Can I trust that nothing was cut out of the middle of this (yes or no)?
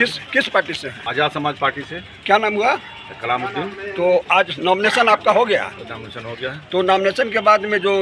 no